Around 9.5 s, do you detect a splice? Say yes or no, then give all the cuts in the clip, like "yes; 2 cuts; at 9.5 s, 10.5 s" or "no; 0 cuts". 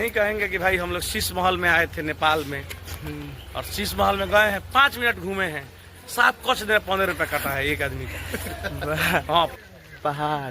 yes; 1 cut; at 9.5 s